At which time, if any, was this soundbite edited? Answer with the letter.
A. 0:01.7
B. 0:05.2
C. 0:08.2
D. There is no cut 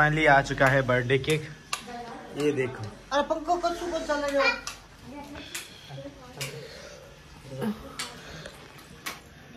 D